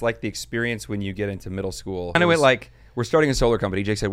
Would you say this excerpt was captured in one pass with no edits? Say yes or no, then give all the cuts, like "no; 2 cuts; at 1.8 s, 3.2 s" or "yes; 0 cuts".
no; 1 cut; at 2.2 s